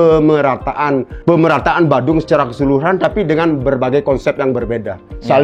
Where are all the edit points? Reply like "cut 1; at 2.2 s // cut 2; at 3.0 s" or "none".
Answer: cut 1; at 1.1 s